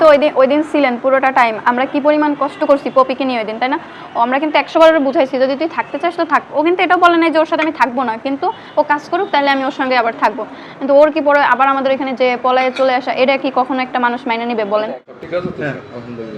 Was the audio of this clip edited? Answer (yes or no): yes